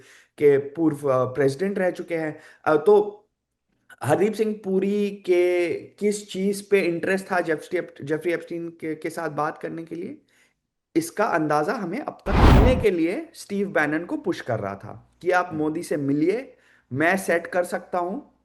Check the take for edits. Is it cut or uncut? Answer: cut